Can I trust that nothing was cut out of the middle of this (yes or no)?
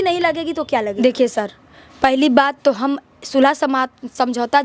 yes